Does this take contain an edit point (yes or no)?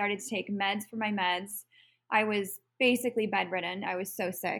no